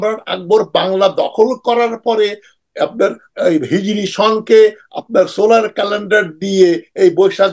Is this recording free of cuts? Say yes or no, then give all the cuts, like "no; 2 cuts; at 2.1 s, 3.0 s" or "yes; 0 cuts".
yes; 0 cuts